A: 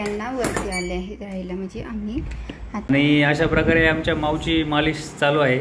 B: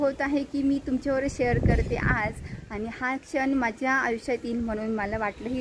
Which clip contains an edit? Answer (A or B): A